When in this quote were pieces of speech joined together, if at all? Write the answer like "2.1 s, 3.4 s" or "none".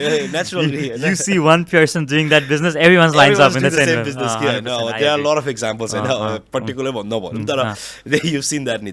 none